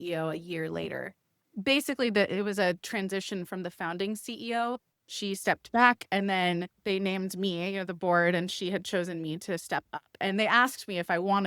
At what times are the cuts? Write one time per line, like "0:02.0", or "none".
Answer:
0:06.7